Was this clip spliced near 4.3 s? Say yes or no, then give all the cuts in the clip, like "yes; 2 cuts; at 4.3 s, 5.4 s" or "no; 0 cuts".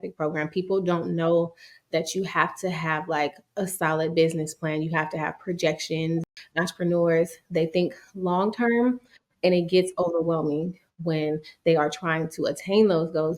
no; 1 cut; at 6.2 s